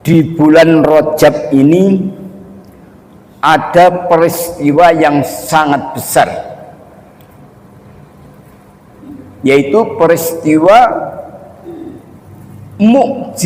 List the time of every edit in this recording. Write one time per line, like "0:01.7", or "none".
none